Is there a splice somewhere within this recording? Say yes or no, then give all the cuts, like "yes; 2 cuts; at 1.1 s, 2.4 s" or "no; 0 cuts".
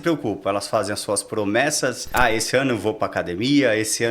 yes; 1 cut; at 2.1 s